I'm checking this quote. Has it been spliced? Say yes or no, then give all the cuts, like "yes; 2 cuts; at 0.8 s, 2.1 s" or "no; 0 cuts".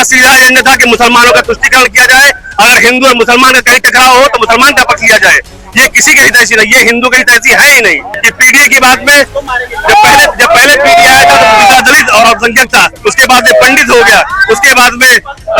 yes; 1 cut; at 8.2 s